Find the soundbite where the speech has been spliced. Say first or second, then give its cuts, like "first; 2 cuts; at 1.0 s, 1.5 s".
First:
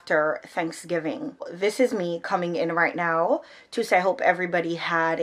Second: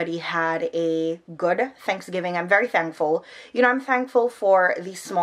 first; 1 cut; at 1.5 s